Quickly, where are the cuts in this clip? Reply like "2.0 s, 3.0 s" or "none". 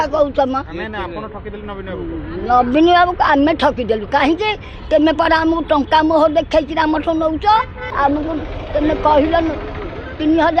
7.8 s